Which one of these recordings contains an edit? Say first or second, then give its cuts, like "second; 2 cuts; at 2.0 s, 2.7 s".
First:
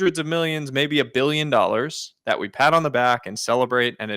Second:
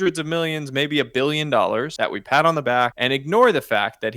second; 2 cuts; at 1.9 s, 2.9 s